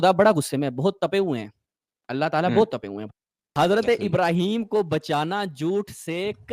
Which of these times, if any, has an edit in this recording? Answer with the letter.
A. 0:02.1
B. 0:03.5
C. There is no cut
B